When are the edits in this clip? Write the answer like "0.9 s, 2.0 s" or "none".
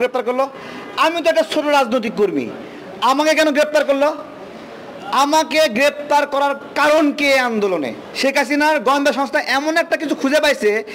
8.0 s